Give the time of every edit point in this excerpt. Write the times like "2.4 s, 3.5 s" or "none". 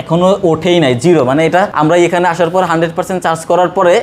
1.7 s